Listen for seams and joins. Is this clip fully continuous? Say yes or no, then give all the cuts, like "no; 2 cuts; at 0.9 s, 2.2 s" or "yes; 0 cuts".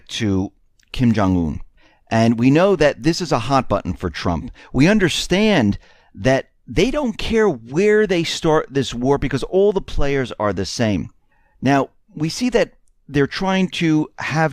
no; 1 cut; at 2.4 s